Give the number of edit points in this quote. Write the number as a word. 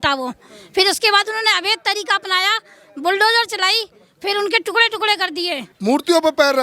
one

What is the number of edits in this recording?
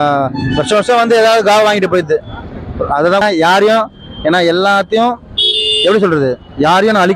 zero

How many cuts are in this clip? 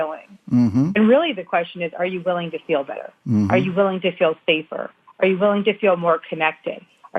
one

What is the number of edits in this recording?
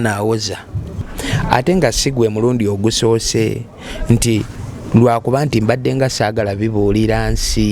one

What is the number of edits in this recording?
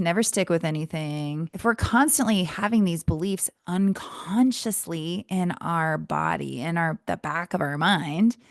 one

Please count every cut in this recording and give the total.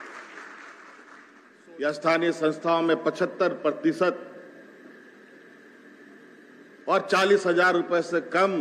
one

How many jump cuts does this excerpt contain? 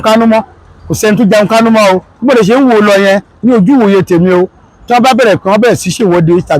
one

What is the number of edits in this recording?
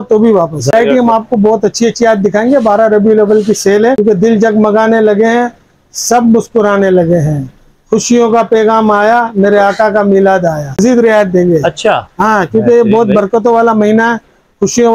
three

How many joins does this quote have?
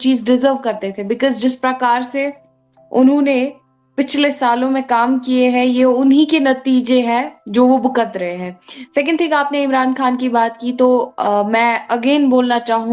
zero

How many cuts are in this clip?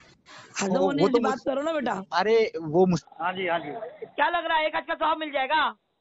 one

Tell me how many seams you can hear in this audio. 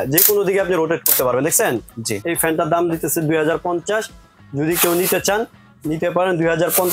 zero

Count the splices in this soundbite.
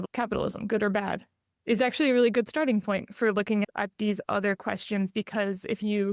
zero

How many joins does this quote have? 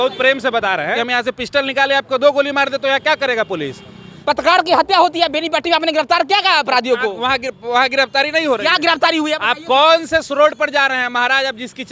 two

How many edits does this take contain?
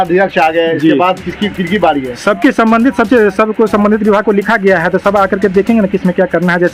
zero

